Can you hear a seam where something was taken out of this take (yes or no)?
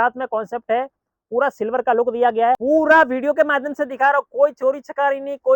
yes